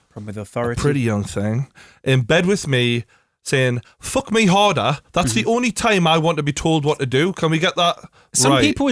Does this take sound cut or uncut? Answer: uncut